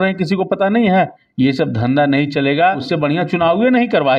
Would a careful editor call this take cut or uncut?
cut